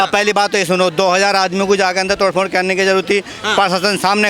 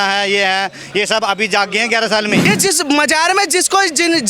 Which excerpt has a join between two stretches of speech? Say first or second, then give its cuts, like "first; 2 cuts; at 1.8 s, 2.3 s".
second; 1 cut; at 2.5 s